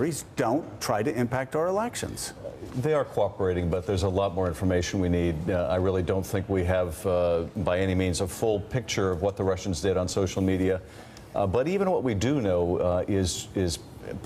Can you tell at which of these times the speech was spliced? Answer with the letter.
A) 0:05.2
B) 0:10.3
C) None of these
B